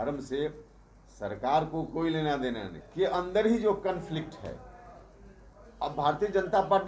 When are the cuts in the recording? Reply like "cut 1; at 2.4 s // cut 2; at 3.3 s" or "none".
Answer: cut 1; at 2.8 s